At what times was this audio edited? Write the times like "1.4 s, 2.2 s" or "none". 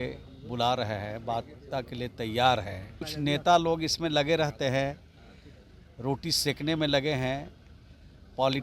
3.0 s